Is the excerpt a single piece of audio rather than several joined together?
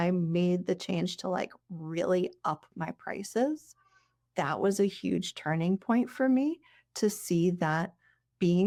yes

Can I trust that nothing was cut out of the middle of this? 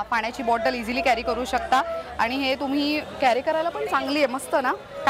yes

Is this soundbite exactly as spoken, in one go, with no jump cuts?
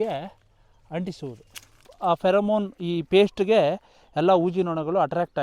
no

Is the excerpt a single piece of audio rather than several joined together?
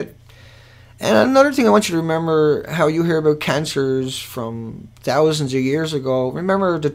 no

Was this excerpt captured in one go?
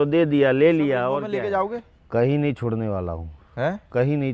no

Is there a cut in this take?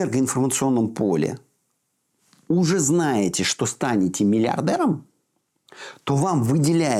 no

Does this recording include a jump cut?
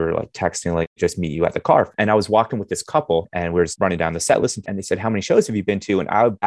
yes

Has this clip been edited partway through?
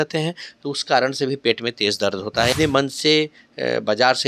yes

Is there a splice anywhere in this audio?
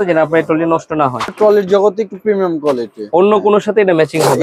yes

